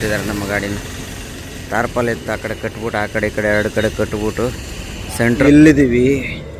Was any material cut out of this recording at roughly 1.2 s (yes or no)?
no